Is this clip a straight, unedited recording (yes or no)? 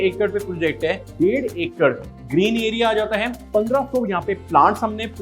no